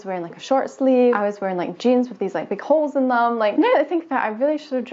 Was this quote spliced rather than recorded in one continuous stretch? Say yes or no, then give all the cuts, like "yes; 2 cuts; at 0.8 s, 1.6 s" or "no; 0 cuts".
no; 0 cuts